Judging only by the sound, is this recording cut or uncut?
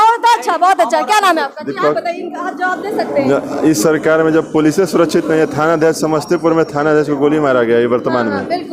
uncut